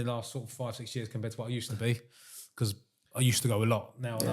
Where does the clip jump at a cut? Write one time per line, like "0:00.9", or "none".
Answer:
none